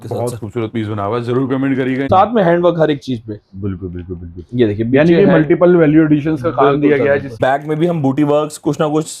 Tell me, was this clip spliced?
yes; 2 cuts; at 2.1 s, 7.4 s

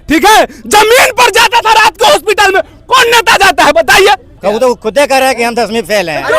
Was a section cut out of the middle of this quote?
yes; 1 cut; at 4.3 s

